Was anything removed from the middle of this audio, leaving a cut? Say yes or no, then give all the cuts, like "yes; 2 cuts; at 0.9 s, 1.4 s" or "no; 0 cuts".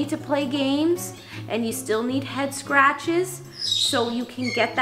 no; 0 cuts